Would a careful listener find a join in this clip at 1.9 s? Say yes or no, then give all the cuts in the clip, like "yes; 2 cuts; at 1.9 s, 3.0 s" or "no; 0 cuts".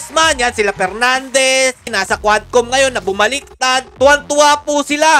yes; 1 cut; at 1.9 s